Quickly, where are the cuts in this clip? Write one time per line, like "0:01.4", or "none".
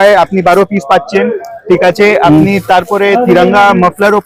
none